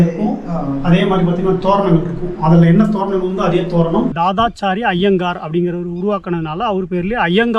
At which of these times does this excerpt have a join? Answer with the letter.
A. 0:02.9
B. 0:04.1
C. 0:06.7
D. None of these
B